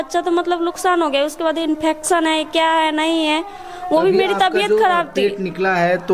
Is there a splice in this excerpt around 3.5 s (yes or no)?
no